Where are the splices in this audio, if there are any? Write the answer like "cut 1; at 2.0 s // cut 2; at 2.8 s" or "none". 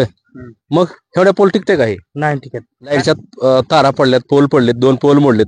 cut 1; at 2.9 s

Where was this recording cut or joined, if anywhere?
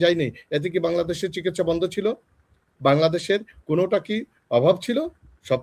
none

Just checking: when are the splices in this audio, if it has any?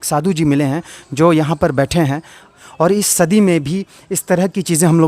cut 1; at 2.6 s

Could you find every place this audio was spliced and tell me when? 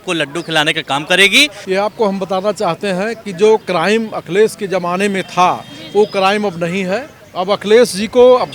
cut 1; at 1.6 s // cut 2; at 3.6 s // cut 3; at 7.2 s

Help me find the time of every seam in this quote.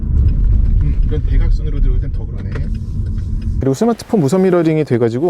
cut 1; at 3.6 s

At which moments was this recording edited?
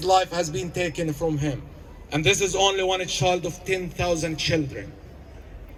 none

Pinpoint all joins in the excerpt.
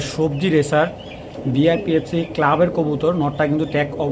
none

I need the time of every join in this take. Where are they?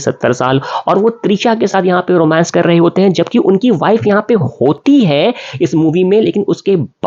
none

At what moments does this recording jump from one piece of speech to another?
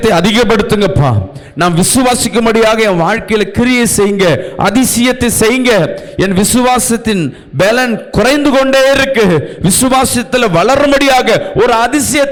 none

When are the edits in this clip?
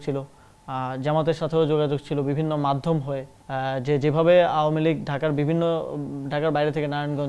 cut 1; at 3.4 s

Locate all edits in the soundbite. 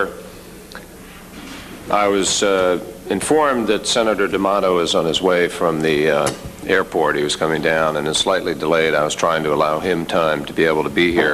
none

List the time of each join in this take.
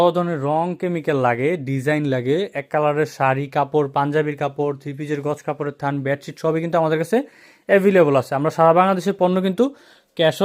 none

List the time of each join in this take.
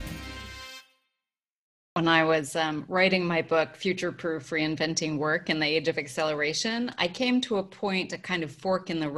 cut 1; at 1.4 s

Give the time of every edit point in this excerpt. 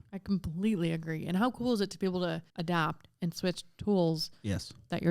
cut 1; at 2.5 s

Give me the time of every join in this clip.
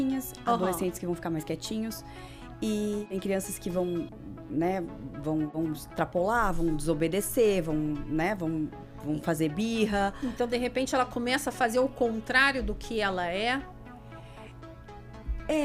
cut 1; at 3.1 s // cut 2; at 5.5 s

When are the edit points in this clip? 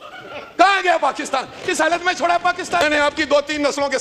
cut 1; at 2.8 s

